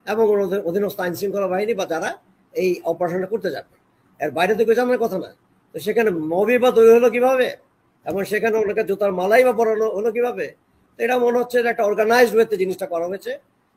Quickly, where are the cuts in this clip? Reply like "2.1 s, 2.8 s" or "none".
none